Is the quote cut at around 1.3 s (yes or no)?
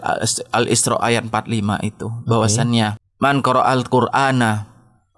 no